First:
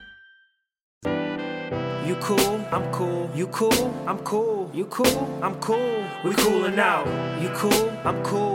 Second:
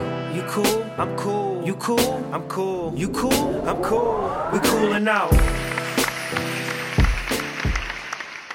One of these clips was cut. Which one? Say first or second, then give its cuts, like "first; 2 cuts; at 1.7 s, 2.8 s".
first; 1 cut; at 1.1 s